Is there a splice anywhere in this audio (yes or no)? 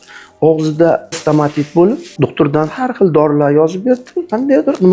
yes